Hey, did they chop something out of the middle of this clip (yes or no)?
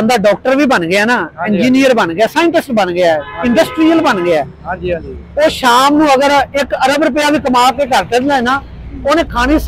no